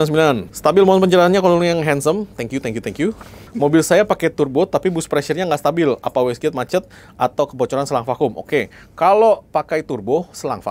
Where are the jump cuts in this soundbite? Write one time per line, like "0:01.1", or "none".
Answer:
none